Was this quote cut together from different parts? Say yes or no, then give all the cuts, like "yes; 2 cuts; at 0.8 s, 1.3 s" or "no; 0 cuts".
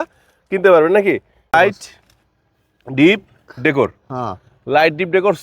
yes; 1 cut; at 1.5 s